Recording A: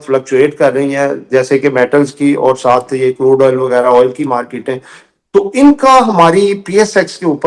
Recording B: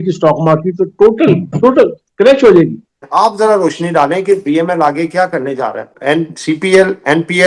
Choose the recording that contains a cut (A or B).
B